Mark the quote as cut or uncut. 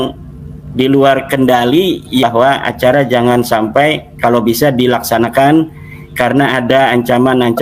cut